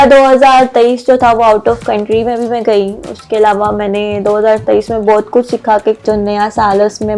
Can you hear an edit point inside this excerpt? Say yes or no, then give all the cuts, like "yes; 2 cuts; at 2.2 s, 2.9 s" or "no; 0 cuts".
yes; 1 cut; at 6.0 s